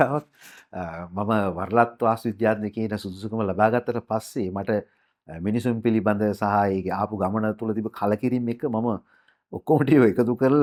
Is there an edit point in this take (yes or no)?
no